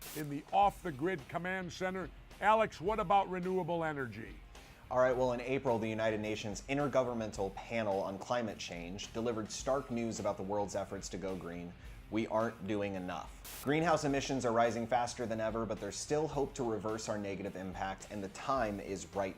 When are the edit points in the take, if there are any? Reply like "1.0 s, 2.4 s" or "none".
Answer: 3.8 s